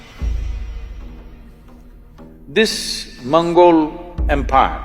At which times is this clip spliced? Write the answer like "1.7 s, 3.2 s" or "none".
none